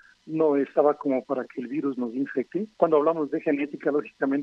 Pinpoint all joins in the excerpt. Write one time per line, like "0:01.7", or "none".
0:02.7